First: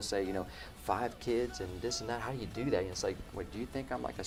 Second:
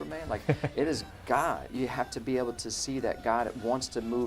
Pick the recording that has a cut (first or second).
second